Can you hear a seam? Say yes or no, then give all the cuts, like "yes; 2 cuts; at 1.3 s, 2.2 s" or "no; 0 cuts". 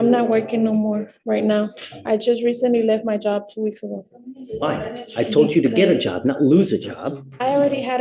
no; 0 cuts